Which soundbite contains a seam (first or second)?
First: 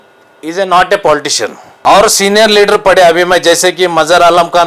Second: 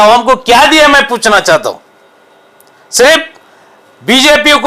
first